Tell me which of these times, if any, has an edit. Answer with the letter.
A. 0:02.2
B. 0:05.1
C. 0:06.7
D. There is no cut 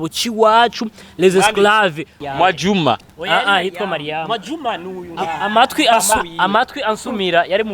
A